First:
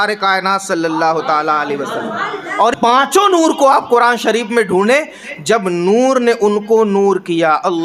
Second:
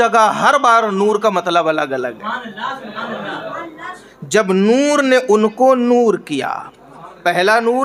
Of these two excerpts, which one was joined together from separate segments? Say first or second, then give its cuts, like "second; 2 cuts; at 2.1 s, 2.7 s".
first; 1 cut; at 2.7 s